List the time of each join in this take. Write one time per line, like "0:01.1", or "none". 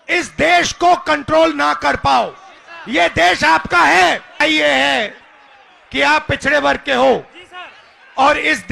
0:04.4